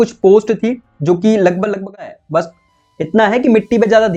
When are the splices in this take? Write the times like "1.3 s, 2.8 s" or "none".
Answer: 2.1 s